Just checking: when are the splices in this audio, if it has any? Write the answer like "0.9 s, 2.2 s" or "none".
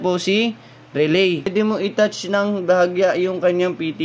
1.4 s